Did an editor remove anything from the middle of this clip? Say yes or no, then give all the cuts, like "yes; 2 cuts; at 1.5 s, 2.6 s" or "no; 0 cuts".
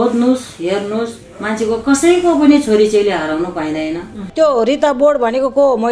yes; 1 cut; at 4.3 s